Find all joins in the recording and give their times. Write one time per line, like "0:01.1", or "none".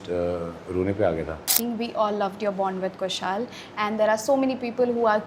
0:01.5

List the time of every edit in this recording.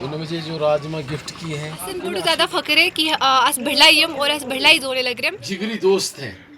0:02.1
0:05.3

